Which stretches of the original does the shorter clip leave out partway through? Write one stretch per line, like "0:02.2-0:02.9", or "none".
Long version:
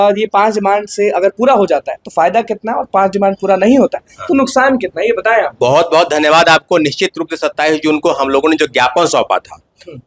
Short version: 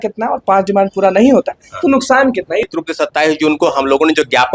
0:05.1-0:07.1